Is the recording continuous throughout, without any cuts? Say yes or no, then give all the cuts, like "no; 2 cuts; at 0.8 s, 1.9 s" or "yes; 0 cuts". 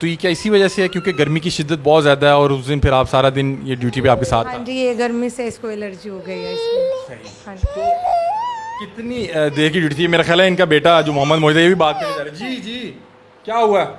yes; 0 cuts